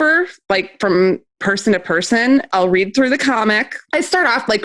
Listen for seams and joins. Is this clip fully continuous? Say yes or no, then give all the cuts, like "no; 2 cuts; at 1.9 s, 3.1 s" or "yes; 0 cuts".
no; 2 cuts; at 2.5 s, 3.7 s